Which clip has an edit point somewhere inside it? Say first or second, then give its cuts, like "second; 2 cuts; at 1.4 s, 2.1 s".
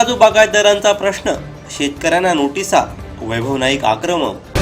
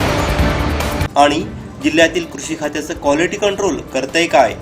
second; 1 cut; at 1.0 s